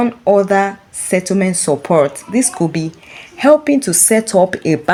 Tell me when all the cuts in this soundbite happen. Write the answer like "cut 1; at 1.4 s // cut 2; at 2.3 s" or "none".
none